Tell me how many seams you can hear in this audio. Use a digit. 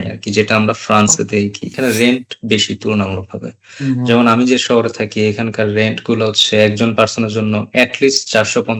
1